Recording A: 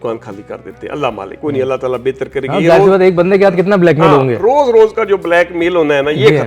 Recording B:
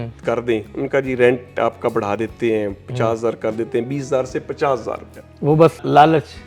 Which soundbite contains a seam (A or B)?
A